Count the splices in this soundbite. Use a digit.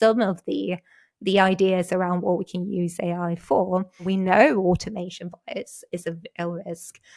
1